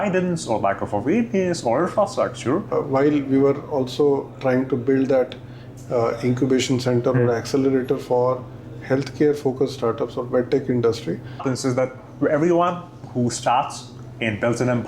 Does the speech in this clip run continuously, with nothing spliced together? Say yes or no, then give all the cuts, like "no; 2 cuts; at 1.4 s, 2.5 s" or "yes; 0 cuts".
no; 2 cuts; at 2.7 s, 11.5 s